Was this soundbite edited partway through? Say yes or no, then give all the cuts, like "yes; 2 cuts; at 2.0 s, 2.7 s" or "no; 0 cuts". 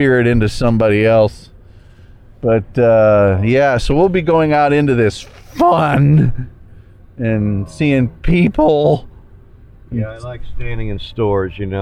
no; 0 cuts